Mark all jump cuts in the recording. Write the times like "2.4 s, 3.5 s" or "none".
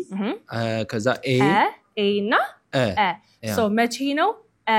none